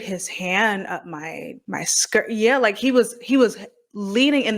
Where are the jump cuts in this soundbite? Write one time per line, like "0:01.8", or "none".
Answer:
0:01.5